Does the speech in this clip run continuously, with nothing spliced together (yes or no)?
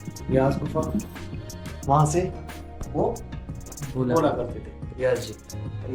yes